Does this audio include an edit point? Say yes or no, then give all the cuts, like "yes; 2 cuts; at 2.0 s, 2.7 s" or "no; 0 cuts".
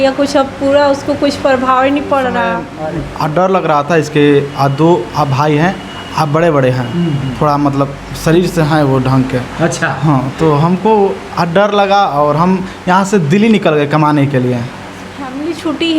yes; 2 cuts; at 2.7 s, 15.1 s